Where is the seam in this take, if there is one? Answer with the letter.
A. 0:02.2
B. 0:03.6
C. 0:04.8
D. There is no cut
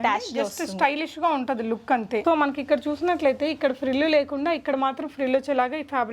A